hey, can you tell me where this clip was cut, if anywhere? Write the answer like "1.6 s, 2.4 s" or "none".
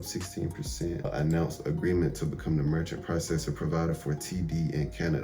1.1 s